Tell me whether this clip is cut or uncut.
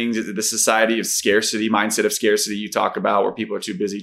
uncut